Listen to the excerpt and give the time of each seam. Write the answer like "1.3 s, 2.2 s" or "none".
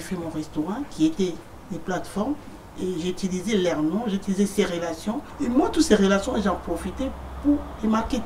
5.3 s

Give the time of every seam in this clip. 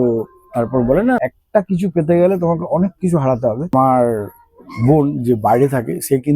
1.2 s, 3.7 s

